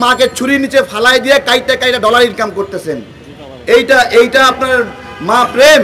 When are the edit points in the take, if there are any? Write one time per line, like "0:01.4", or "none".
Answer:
none